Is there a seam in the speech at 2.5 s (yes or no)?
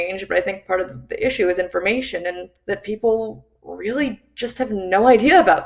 yes